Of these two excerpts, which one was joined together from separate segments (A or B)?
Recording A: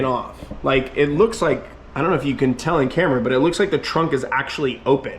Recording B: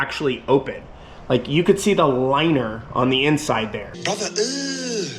B